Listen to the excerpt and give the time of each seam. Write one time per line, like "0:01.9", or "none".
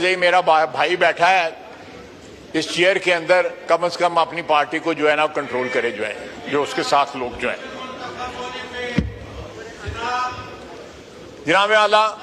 none